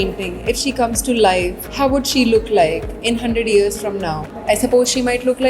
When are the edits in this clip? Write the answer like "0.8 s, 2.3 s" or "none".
1.6 s, 4.3 s